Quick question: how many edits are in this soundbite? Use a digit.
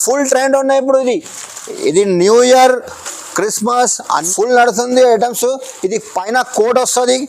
1